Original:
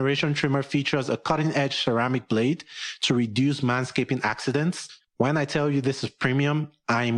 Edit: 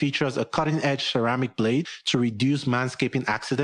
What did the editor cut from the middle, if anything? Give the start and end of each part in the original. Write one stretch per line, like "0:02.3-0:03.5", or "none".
0:02.7-0:02.9